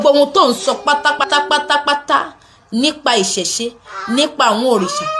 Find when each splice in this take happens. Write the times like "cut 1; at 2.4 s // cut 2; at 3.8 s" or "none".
cut 1; at 1.2 s